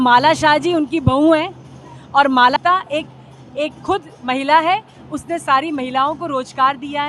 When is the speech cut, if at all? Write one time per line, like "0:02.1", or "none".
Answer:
0:02.6